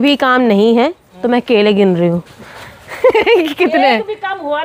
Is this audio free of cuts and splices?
yes; 0 cuts

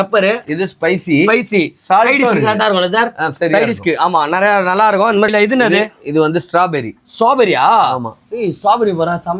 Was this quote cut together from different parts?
yes; 1 cut; at 5.3 s

